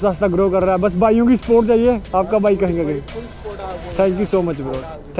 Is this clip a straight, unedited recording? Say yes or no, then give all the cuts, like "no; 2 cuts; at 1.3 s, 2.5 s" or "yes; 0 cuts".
yes; 0 cuts